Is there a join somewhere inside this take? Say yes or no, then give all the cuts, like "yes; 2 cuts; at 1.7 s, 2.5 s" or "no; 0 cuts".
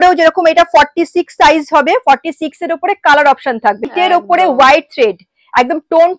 yes; 1 cut; at 3.9 s